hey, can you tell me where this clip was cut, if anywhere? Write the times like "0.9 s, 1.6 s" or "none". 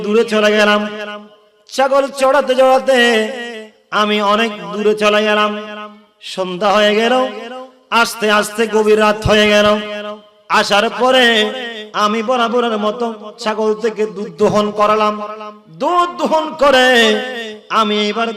none